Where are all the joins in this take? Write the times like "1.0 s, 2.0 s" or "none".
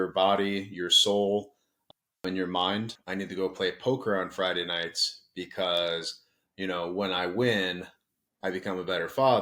3.0 s